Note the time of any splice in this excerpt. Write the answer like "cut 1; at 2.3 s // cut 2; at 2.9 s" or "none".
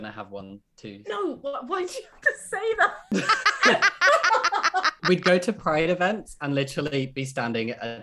cut 1; at 3.0 s // cut 2; at 4.9 s